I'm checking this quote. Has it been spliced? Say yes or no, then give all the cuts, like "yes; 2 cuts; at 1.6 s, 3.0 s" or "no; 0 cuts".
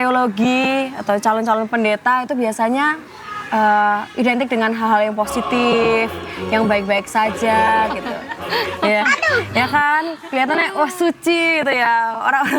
no; 0 cuts